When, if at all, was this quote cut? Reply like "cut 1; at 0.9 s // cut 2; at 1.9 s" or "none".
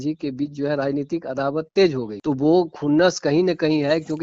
cut 1; at 2.1 s